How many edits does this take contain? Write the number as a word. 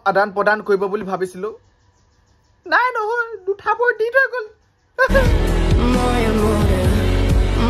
one